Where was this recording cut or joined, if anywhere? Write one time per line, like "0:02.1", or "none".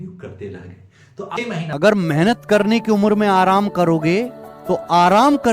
0:01.3